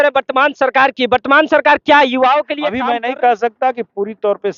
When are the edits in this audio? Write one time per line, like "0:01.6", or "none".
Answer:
0:02.8